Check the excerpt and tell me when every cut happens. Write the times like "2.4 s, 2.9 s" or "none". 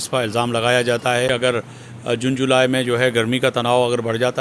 1.3 s